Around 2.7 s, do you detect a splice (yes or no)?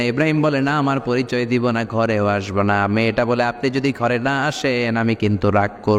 no